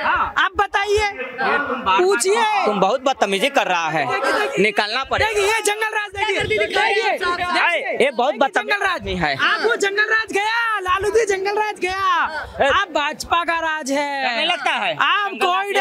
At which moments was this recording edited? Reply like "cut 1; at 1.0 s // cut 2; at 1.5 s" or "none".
none

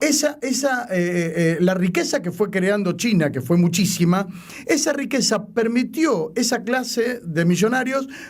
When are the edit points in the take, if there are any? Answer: none

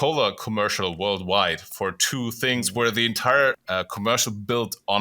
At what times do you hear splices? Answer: cut 1; at 3.6 s

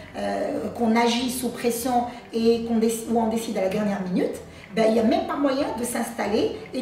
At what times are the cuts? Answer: none

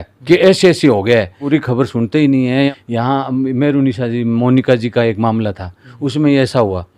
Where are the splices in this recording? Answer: cut 1; at 1.4 s // cut 2; at 2.7 s

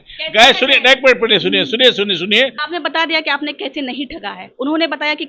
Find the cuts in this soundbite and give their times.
cut 1; at 2.6 s

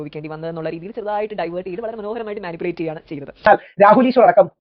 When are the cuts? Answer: cut 1; at 3.5 s

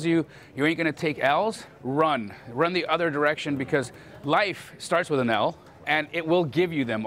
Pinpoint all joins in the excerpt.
cut 1; at 1.7 s // cut 2; at 5.8 s

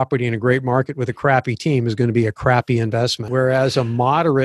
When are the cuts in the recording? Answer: cut 1; at 3.2 s

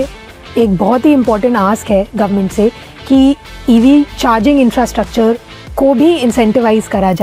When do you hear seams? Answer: none

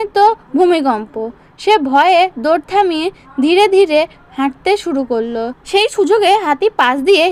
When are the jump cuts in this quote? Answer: cut 1; at 5.6 s

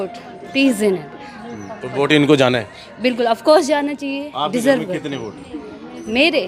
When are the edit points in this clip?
none

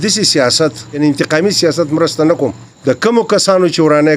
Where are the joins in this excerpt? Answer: cut 1; at 1.0 s // cut 2; at 2.7 s

